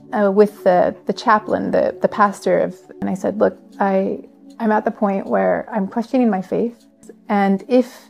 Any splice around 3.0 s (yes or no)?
yes